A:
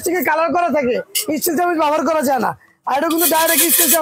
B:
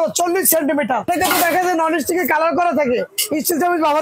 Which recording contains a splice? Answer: B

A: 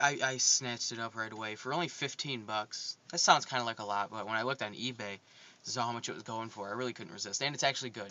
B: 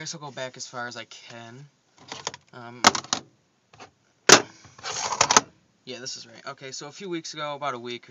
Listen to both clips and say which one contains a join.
B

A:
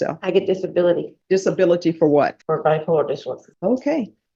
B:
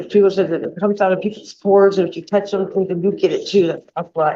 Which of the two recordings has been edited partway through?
A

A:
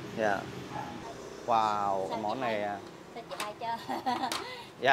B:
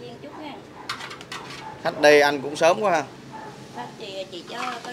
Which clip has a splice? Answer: A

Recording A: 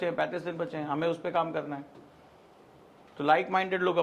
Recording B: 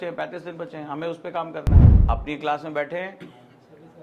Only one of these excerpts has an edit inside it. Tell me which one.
B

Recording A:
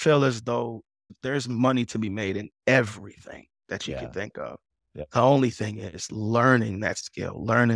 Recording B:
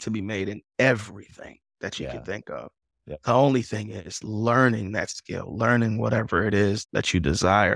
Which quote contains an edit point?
B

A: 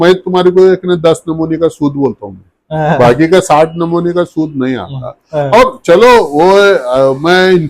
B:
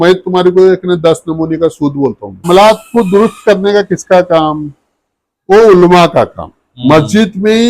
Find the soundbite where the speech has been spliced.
B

